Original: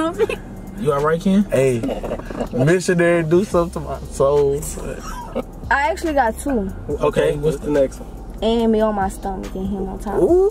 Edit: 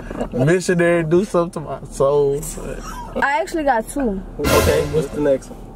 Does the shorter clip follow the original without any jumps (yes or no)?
no